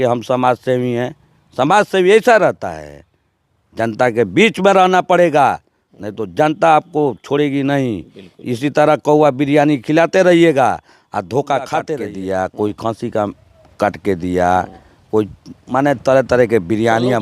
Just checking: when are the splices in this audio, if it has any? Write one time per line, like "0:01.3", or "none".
0:12.0